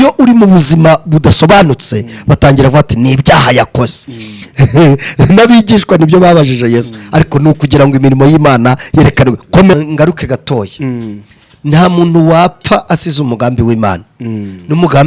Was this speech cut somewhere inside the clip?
yes; 1 cut; at 9.7 s

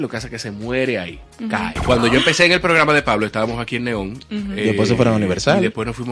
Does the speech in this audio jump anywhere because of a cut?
yes; 1 cut; at 1.7 s

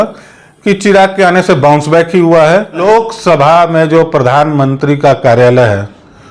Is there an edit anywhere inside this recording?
yes; 1 cut; at 2.8 s

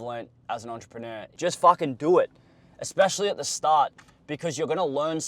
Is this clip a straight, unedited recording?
no; 1 cut; at 1.3 s

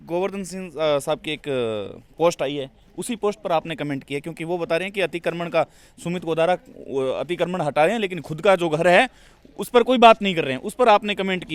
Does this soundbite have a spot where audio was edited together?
no; 0 cuts

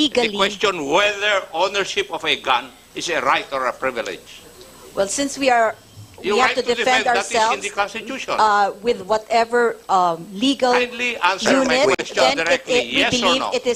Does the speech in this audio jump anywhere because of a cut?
no; 0 cuts

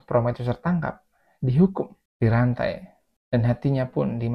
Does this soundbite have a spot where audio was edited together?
no; 0 cuts

